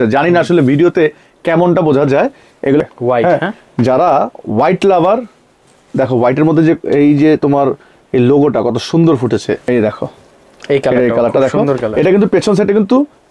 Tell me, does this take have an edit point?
yes; 2 cuts; at 2.8 s, 9.6 s

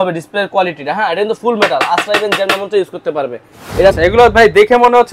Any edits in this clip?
yes; 1 cut; at 4.0 s

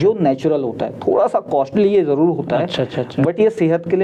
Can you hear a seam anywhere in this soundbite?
no; 0 cuts

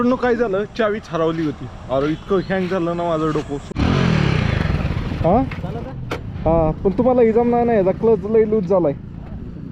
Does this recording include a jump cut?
yes; 1 cut; at 3.7 s

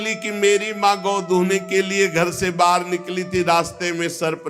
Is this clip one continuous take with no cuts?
yes; 0 cuts

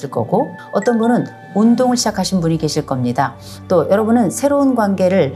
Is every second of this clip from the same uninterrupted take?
yes; 0 cuts

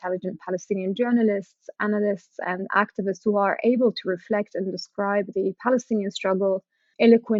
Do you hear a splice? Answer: no; 0 cuts

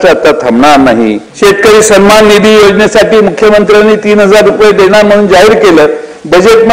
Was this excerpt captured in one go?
no; 1 cut; at 1.2 s

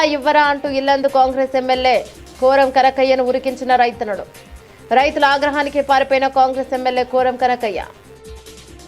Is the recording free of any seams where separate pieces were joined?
no; 1 cut; at 8.0 s

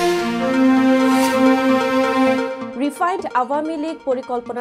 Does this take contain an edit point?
no; 0 cuts

